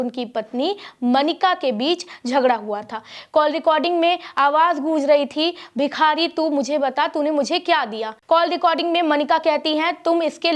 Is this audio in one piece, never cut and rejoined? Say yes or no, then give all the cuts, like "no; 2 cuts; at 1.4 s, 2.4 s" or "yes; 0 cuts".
no; 1 cut; at 8.1 s